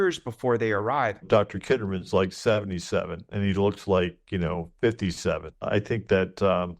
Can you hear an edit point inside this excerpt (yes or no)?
yes